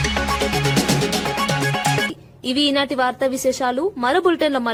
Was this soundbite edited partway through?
no; 0 cuts

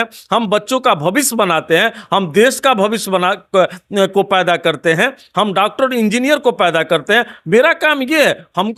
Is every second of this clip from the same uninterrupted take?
yes; 0 cuts

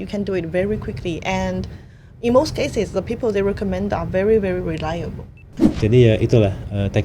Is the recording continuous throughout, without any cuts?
no; 1 cut; at 5.6 s

